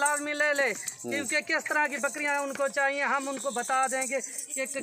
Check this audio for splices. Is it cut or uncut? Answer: uncut